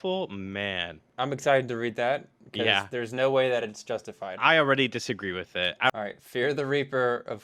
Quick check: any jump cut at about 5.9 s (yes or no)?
yes